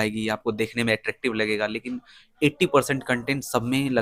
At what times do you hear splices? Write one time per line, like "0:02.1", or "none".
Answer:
none

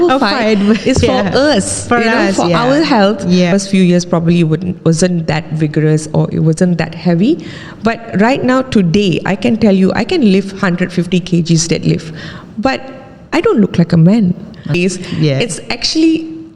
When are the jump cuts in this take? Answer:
0:03.5
0:14.8

